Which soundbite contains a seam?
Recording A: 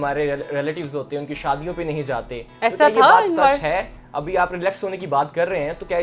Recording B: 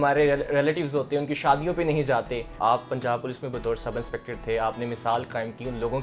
B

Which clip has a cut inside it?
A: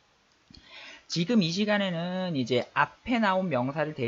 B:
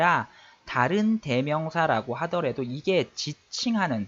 B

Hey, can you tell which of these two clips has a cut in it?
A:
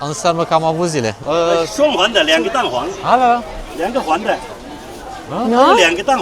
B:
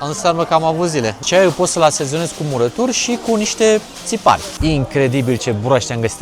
B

